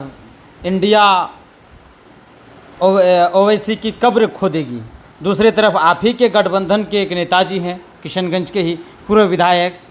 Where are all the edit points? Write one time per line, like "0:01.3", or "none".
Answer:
none